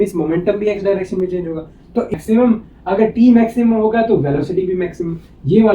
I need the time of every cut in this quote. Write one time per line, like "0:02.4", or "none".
0:02.1